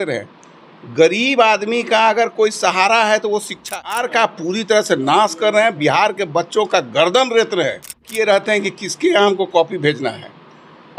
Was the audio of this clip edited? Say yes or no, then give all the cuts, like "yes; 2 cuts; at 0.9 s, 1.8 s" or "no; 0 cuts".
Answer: yes; 2 cuts; at 4.0 s, 8.0 s